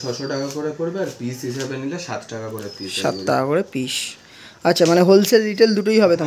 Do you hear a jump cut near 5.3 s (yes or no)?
no